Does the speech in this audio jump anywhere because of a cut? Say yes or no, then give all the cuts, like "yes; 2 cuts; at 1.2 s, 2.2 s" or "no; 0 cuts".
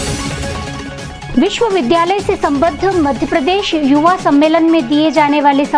yes; 1 cut; at 1.2 s